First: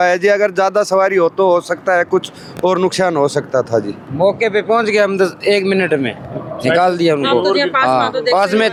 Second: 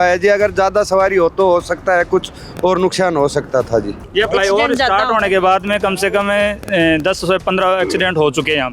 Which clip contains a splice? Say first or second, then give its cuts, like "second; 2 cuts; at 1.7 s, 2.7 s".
second; 1 cut; at 4.1 s